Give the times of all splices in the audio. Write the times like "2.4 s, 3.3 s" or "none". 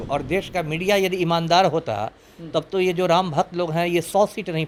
none